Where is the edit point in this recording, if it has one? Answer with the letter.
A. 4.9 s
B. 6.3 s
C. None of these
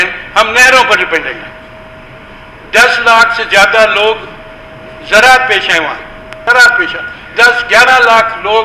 B